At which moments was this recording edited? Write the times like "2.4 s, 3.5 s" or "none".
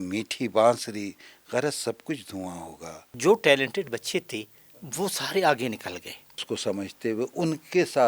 3.1 s, 6.4 s